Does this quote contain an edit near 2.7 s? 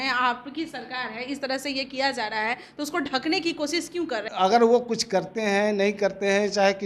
no; 1 cut; at 4.3 s

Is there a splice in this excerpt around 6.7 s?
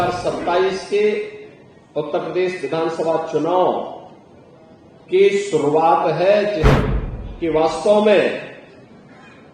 yes; 1 cut; at 6.7 s

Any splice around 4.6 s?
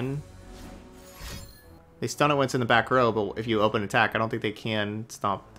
no; 1 cut; at 1.8 s

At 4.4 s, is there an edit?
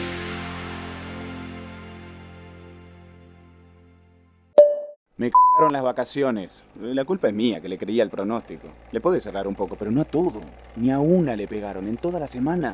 yes; 1 cut; at 4.4 s

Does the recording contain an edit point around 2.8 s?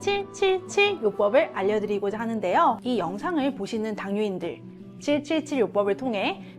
yes; 1 cut; at 2.8 s

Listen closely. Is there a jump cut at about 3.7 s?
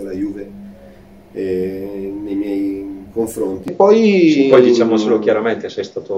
yes; 1 cut; at 3.7 s

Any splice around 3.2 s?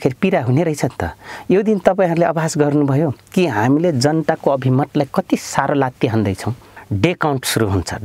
no; 1 cut; at 6.7 s

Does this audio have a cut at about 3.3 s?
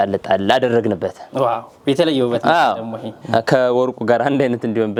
no; 0 cuts

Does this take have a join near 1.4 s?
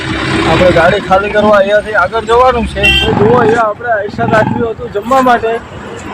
no; 1 cut; at 3.0 s

